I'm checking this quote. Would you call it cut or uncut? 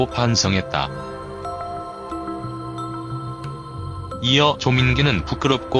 uncut